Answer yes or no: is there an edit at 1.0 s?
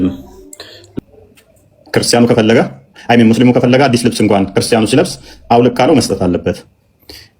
yes